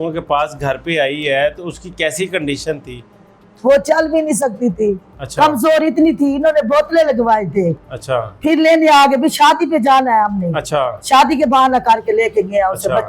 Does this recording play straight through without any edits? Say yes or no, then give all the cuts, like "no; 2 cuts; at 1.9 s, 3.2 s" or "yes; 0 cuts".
yes; 0 cuts